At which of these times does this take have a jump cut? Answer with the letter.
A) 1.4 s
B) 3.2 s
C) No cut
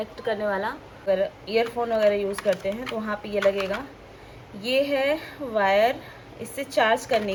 C